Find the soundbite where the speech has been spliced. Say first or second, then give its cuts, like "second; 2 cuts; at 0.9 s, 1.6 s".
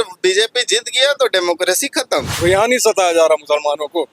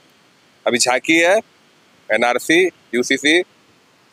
first; 1 cut; at 2.3 s